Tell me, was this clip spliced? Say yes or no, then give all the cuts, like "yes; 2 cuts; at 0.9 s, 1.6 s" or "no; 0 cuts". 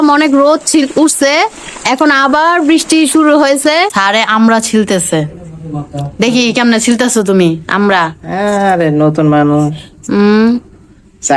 yes; 1 cut; at 3.9 s